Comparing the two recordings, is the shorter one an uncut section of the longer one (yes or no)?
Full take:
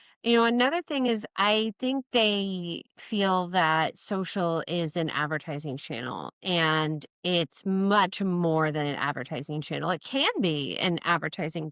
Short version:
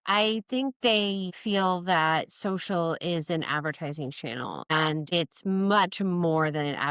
no